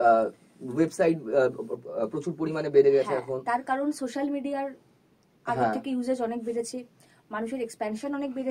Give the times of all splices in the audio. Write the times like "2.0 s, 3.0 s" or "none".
none